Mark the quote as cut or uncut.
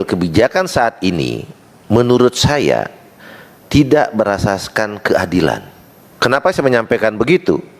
cut